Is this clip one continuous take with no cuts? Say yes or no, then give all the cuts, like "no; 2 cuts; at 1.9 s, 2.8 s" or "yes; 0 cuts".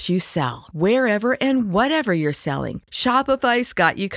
yes; 0 cuts